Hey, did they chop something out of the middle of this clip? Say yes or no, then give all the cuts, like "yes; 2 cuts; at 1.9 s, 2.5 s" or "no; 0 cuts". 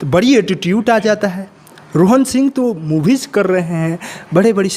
no; 0 cuts